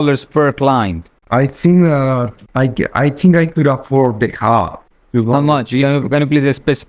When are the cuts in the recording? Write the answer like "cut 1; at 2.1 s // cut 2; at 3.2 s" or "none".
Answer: cut 1; at 1.2 s

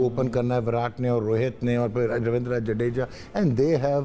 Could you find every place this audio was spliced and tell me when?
none

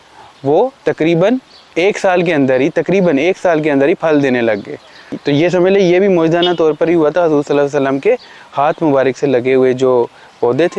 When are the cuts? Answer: none

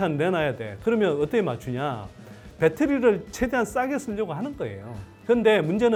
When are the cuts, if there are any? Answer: none

